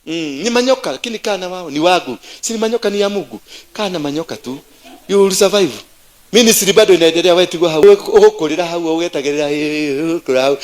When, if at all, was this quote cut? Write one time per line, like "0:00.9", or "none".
0:07.8